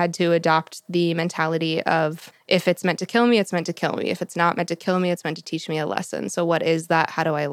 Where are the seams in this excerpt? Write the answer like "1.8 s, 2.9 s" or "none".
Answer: 2.3 s